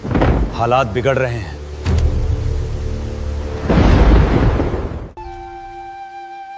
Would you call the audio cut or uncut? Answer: uncut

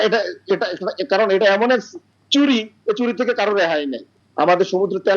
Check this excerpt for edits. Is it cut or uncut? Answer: uncut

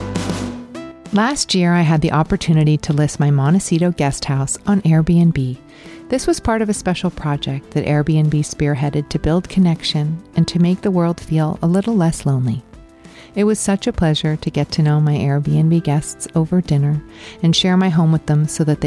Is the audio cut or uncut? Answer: cut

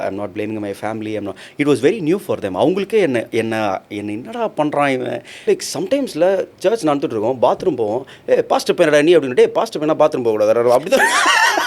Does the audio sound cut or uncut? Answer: cut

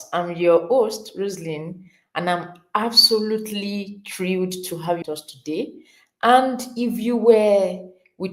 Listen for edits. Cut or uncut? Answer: cut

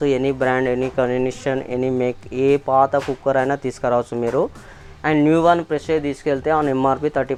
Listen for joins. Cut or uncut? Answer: uncut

